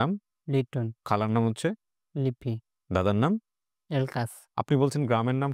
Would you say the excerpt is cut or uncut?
cut